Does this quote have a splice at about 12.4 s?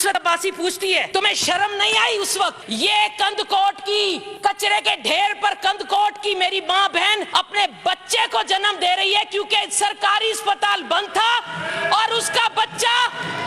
no; 4 cuts; at 1.1 s, 2.6 s, 4.3 s, 7.3 s

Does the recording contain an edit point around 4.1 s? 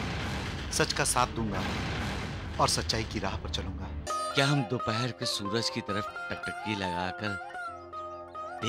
yes; 1 cut; at 4.1 s

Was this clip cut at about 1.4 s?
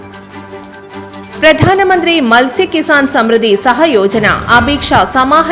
yes; 1 cut; at 1.4 s

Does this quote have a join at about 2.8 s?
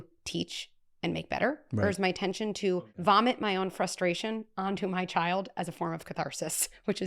yes; 1 cut; at 2.8 s

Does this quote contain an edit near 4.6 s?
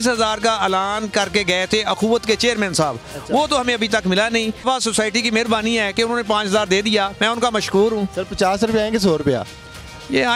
yes; 1 cut; at 4.6 s

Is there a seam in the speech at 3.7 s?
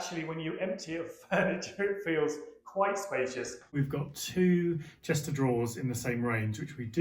yes; 1 cut; at 3.7 s

